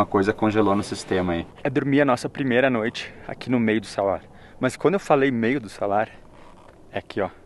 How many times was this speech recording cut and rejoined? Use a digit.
1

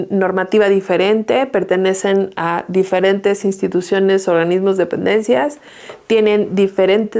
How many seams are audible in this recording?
0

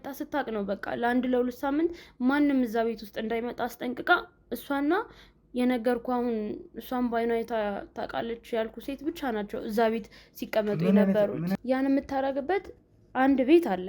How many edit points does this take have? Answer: 1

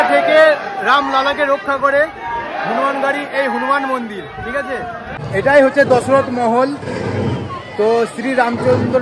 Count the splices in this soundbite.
1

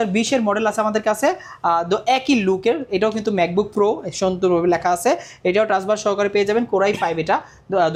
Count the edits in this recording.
0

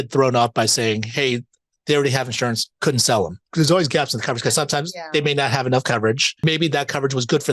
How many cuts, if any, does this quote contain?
3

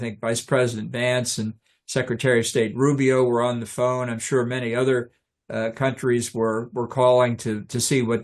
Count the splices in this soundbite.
0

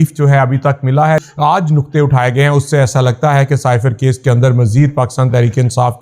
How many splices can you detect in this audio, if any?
1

